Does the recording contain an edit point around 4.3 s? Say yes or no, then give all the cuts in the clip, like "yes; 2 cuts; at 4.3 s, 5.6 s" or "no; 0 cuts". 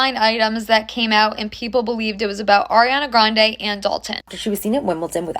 yes; 1 cut; at 4.3 s